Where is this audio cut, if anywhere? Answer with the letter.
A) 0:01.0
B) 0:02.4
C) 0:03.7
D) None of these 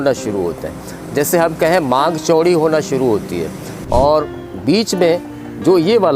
C